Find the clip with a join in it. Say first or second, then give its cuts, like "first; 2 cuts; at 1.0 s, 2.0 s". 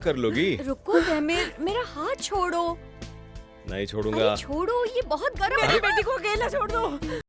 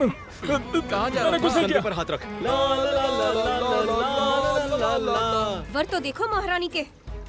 second; 1 cut; at 5.7 s